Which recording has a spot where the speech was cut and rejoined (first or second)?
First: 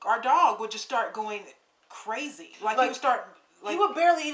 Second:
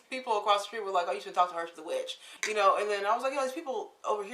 second